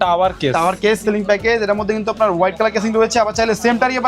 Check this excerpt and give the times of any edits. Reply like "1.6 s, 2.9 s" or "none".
1.0 s